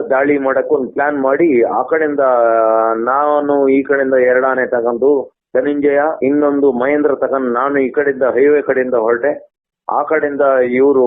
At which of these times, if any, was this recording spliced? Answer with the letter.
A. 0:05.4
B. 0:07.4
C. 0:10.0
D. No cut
A